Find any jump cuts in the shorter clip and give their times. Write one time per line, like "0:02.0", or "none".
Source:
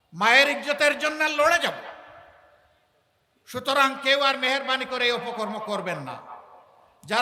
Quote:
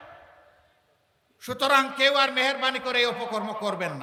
none

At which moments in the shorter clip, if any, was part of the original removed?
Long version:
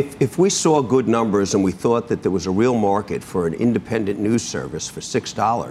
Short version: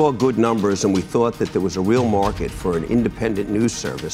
none

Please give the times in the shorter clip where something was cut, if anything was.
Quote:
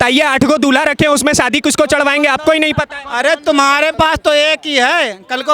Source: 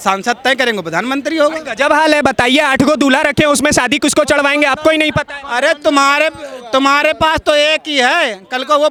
0:03.9

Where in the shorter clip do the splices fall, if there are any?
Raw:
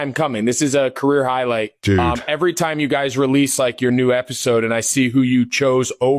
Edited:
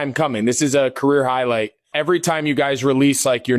0:01.8

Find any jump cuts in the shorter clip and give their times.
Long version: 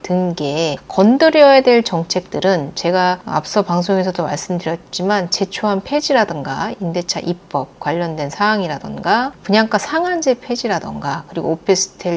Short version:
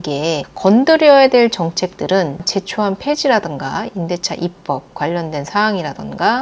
0:02.4

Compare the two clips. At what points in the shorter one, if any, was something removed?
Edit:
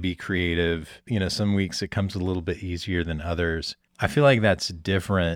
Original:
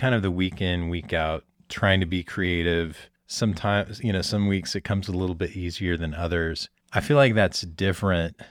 0:01.0

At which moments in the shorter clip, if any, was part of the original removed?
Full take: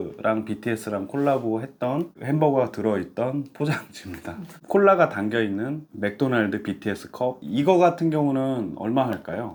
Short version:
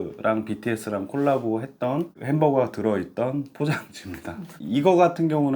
0:04.6

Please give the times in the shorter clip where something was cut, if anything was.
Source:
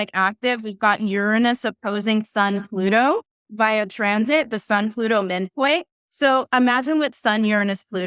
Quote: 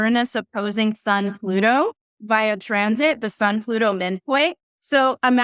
none

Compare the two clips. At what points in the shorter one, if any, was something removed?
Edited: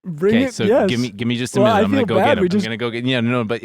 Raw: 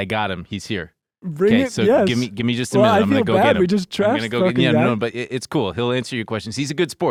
0:02.7

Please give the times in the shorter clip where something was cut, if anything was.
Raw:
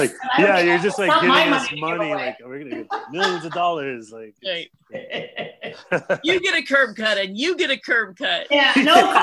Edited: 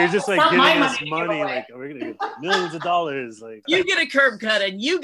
0:03.6

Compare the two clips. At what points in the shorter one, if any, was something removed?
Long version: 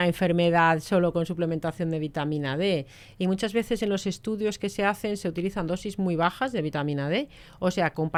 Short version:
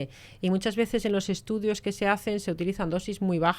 none

